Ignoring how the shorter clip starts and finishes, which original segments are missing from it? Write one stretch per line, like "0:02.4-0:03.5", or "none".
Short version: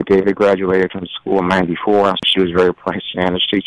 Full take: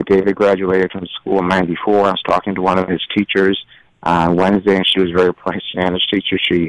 0:02.2-0:04.8